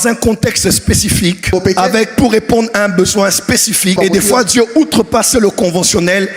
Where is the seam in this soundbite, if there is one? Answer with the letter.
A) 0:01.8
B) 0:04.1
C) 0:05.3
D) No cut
D